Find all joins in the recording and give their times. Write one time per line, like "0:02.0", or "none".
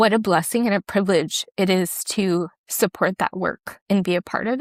none